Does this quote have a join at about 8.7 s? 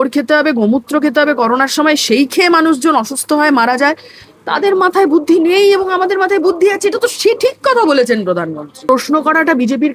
yes; 1 cut; at 8.7 s

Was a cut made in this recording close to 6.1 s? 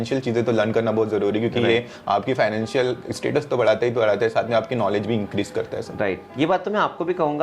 no; 0 cuts

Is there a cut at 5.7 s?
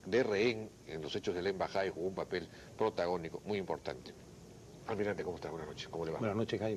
no; 1 cut; at 3.1 s

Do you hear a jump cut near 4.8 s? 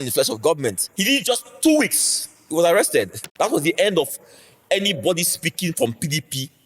no; 2 cuts; at 0.9 s, 3.2 s

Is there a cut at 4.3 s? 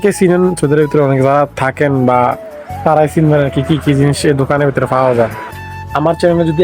no; 1 cut; at 5.6 s

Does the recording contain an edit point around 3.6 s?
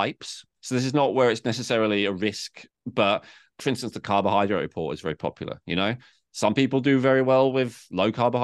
yes; 1 cut; at 3.6 s

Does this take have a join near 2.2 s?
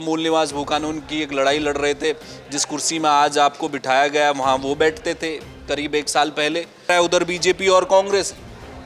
no; 1 cut; at 6.9 s

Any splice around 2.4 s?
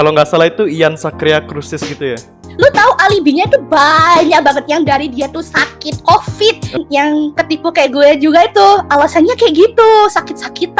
yes; 2 cuts; at 2.4 s, 6.8 s

